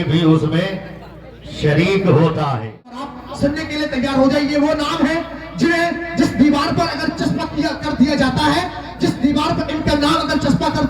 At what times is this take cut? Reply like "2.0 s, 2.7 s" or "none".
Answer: 3.2 s